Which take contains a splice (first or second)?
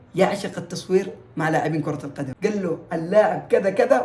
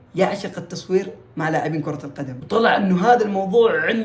first